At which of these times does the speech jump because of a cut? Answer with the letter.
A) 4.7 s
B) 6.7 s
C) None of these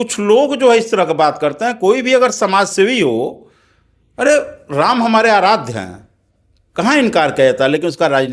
C